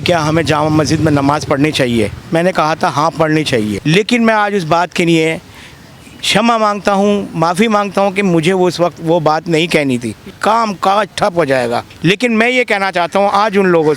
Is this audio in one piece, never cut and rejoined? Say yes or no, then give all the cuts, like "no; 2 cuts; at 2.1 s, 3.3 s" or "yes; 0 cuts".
no; 4 cuts; at 2.2 s, 3.8 s, 10.3 s, 11.9 s